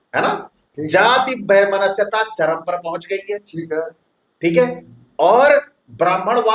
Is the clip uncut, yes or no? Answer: yes